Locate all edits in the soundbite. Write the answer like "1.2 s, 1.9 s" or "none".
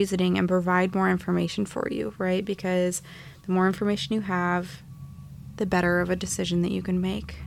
none